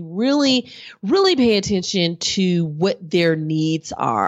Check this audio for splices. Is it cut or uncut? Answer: uncut